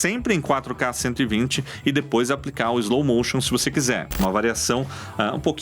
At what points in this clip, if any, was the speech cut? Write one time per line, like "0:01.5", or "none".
0:04.1